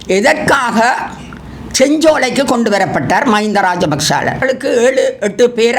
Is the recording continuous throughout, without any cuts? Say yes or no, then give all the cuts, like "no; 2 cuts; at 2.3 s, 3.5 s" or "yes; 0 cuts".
no; 1 cut; at 4.4 s